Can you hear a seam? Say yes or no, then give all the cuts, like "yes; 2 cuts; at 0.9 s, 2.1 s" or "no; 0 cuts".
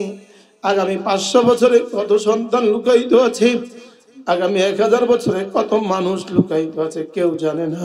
no; 0 cuts